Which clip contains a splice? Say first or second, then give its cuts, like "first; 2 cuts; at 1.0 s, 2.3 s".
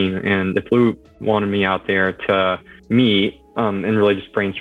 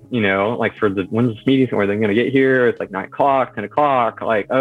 first; 1 cut; at 2.7 s